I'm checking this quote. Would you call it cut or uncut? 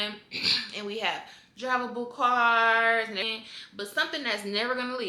cut